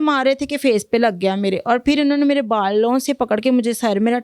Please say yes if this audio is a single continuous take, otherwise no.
yes